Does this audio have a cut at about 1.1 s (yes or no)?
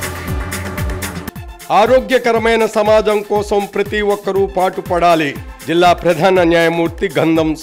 no